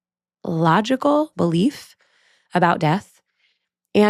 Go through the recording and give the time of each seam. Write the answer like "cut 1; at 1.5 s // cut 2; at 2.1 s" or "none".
cut 1; at 1.3 s